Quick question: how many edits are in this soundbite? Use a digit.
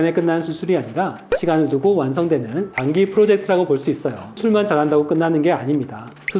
1